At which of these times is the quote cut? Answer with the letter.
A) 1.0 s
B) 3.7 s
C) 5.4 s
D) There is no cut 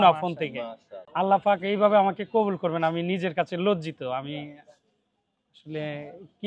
A